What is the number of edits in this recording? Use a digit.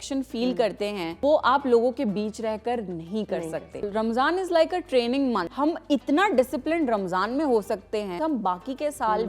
4